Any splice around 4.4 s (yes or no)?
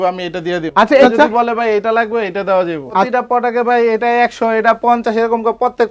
no